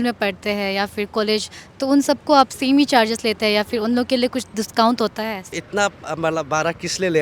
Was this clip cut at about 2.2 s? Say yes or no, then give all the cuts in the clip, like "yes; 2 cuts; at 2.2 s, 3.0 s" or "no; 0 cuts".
no; 1 cut; at 5.6 s